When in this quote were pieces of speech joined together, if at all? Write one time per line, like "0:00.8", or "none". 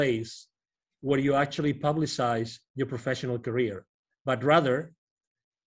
none